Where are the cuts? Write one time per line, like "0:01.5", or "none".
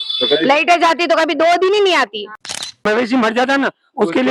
0:02.8